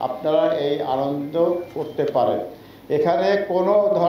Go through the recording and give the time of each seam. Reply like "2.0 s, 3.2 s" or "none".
none